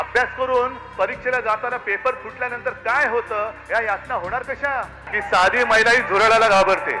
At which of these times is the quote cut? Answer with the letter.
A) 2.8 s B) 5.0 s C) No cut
B